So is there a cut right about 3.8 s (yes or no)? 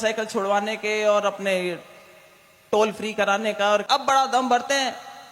yes